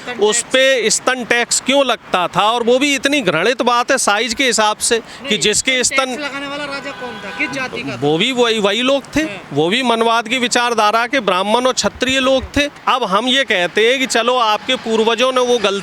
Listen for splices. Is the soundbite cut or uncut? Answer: cut